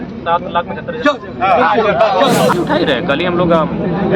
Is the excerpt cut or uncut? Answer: cut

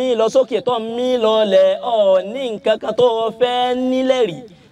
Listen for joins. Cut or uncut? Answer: uncut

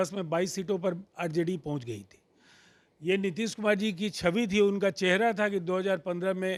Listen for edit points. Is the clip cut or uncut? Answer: uncut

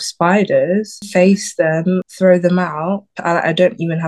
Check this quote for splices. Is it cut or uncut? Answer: cut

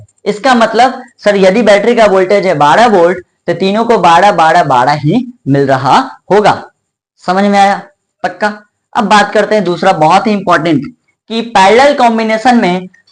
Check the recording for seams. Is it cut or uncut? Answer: uncut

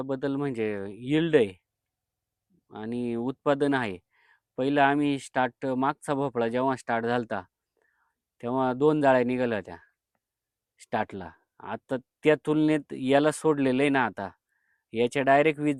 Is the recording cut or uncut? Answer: uncut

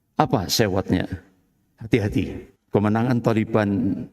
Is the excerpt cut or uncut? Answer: cut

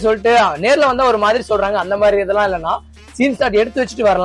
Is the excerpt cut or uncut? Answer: uncut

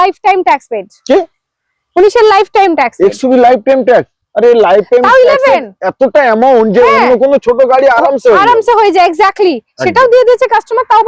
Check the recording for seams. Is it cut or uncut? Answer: uncut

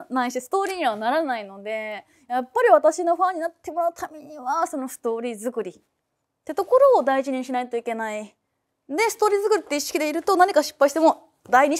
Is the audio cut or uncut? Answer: uncut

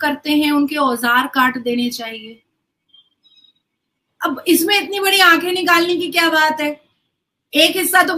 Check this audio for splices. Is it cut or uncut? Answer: uncut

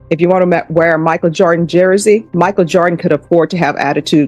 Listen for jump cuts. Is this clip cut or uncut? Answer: cut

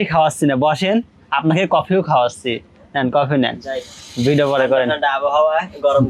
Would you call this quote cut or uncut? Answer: uncut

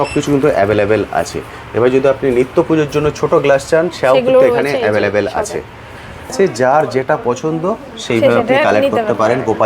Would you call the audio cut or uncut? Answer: cut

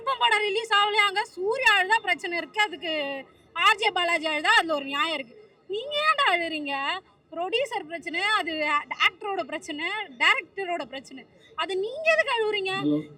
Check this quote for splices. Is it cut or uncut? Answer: uncut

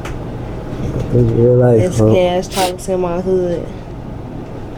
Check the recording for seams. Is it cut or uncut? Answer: uncut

